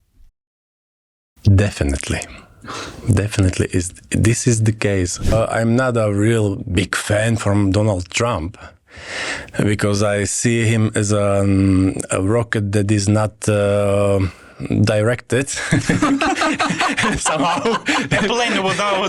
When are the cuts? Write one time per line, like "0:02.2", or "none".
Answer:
0:05.3